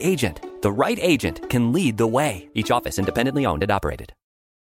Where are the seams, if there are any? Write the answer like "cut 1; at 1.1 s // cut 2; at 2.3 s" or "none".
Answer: cut 1; at 2.4 s